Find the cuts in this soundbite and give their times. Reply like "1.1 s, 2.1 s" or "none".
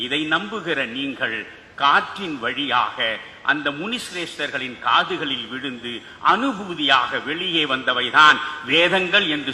none

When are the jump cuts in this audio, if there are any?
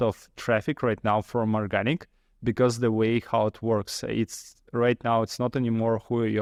none

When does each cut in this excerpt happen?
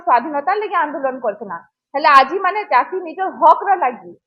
none

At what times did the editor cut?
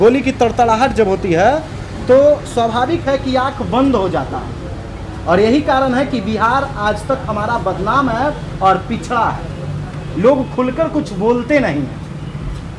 none

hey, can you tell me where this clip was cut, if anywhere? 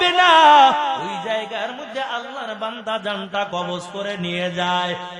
1.1 s

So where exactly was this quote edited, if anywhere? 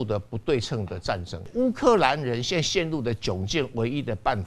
1.5 s

